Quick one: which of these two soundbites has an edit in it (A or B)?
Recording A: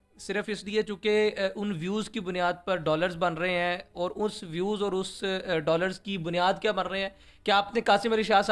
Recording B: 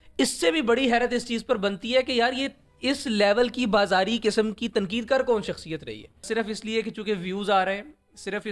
B